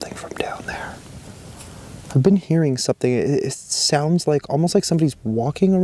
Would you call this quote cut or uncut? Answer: uncut